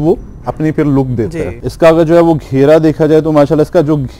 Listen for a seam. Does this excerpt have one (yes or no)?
yes